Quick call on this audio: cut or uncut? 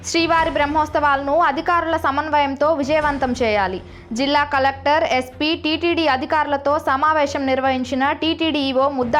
uncut